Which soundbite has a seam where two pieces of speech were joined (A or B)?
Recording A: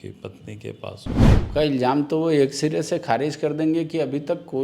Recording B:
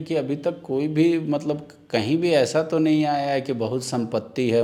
A